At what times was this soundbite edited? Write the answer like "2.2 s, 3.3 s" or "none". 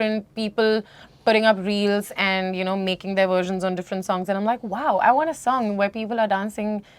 none